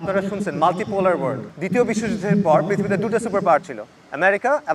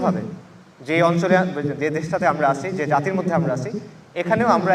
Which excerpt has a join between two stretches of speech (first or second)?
first